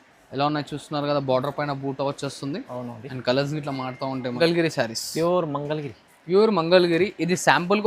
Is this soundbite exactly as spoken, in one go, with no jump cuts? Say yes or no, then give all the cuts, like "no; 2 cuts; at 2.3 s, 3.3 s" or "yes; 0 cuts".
no; 1 cut; at 4.4 s